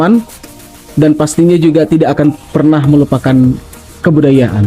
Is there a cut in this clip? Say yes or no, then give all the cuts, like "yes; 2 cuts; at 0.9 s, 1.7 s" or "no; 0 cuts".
no; 0 cuts